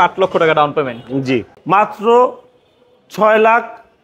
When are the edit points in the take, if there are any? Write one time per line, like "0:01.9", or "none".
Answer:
0:01.5